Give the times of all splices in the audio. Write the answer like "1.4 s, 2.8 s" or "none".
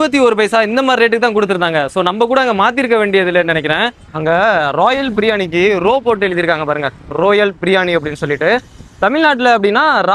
4.1 s